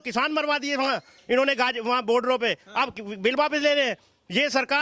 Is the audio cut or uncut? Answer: uncut